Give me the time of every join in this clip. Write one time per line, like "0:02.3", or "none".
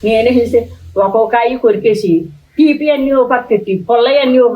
none